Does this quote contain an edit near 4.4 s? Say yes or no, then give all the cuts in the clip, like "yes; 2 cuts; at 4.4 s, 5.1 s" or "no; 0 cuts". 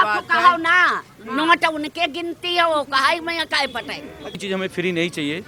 yes; 1 cut; at 4.4 s